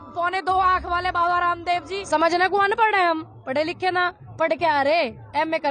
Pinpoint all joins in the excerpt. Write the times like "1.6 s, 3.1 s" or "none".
2.0 s